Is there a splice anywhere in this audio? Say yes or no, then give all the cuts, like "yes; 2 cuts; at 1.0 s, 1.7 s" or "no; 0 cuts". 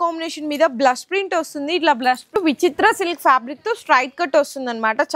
yes; 1 cut; at 2.4 s